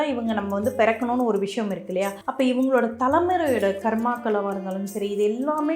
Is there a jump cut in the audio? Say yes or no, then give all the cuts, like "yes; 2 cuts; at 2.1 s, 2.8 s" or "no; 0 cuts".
yes; 1 cut; at 2.2 s